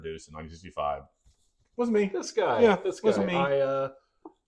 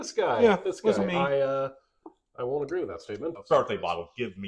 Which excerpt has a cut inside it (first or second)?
second